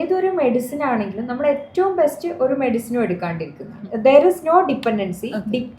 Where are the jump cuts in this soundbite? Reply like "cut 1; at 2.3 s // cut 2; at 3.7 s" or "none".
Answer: cut 1; at 3.9 s